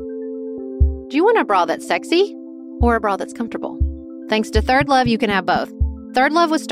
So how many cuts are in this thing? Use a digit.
1